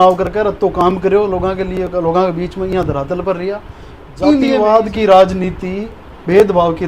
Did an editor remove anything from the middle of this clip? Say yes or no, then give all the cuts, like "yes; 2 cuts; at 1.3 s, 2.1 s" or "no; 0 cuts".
yes; 1 cut; at 4.5 s